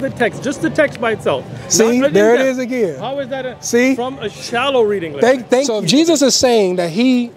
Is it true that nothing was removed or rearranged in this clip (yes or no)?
no